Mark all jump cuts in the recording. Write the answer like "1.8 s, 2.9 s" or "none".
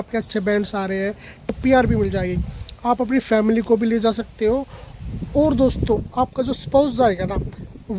1.3 s